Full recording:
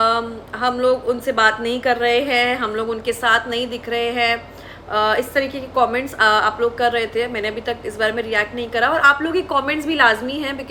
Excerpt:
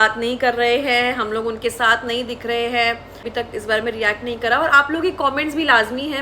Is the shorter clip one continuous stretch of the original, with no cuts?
no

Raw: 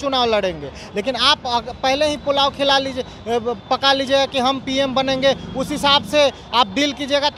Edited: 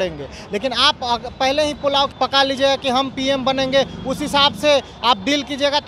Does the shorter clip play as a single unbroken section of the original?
no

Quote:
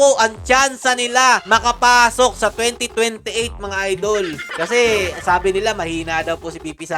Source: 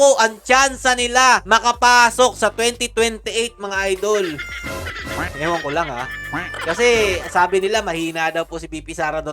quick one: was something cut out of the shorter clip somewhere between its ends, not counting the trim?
yes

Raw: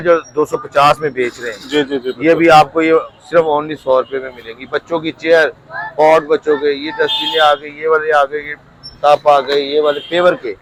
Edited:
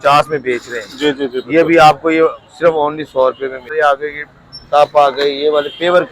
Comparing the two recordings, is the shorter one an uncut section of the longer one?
no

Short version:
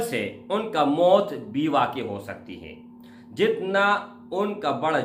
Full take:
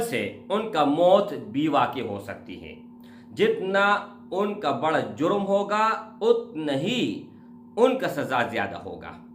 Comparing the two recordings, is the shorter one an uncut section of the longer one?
yes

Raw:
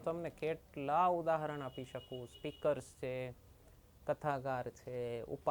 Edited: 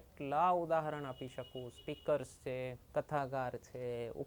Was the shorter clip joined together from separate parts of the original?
yes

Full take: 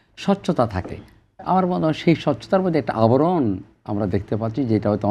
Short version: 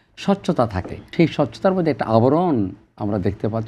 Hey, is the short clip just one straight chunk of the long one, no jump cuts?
no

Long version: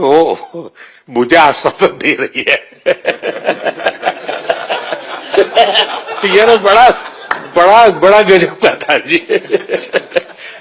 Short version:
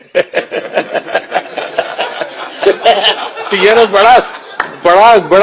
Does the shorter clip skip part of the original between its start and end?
no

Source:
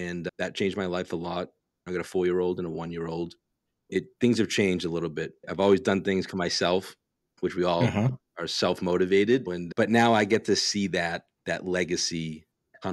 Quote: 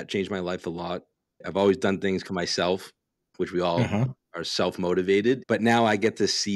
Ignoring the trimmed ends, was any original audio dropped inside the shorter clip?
yes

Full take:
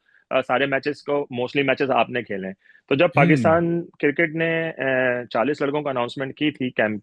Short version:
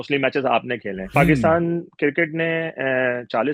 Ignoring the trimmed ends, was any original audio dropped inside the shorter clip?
yes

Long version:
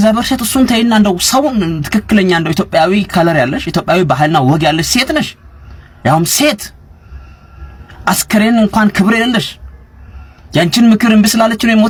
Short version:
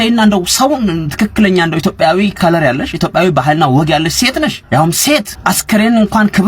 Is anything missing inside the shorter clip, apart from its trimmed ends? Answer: yes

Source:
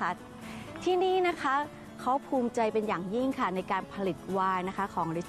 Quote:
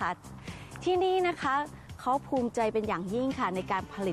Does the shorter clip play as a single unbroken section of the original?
yes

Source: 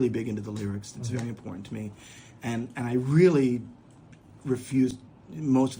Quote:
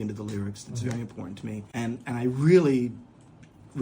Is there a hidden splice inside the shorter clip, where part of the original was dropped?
yes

